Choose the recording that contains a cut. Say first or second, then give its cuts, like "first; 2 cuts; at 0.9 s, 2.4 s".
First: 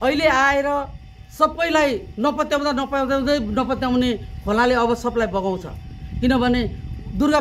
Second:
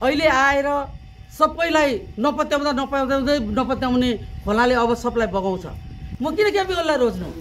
second; 1 cut; at 6.1 s